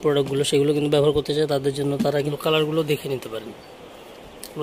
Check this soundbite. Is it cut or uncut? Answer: cut